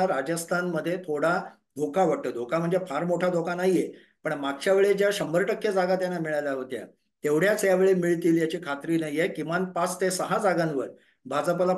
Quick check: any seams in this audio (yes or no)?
no